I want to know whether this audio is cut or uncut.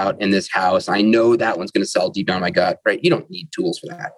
uncut